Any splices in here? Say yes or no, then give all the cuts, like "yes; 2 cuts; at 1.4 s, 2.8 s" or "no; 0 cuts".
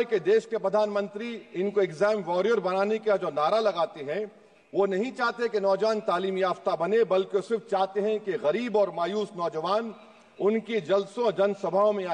no; 0 cuts